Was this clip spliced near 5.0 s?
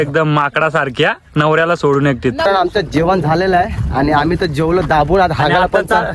no; 1 cut; at 2.4 s

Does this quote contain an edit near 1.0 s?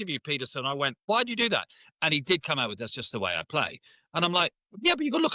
yes; 1 cut; at 1.0 s

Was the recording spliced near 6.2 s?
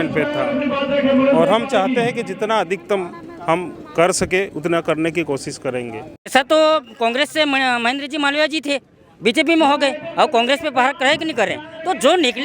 yes; 1 cut; at 6.2 s

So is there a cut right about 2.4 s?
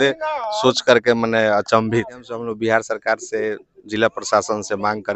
yes; 1 cut; at 2.4 s

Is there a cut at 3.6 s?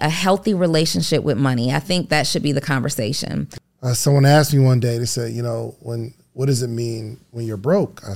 yes; 1 cut; at 3.6 s

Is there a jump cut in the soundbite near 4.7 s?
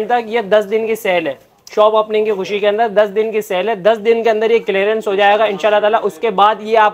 no; 0 cuts

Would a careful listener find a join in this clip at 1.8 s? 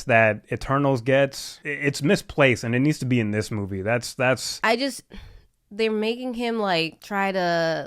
no; 1 cut; at 4.5 s

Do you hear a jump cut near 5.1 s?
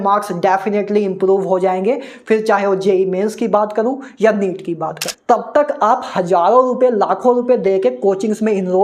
yes; 1 cut; at 5.1 s

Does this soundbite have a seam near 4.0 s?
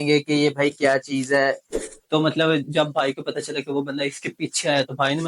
no; 1 cut; at 1.7 s

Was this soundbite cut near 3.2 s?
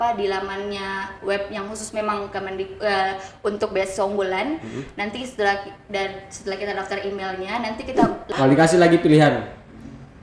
no; 1 cut; at 8.3 s

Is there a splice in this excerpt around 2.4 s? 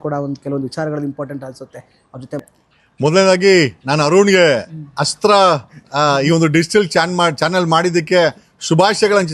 yes; 1 cut; at 2.4 s

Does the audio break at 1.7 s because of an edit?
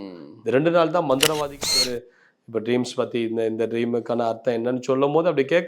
yes; 1 cut; at 1.7 s

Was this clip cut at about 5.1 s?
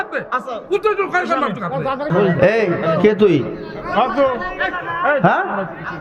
no; 1 cut; at 2.1 s

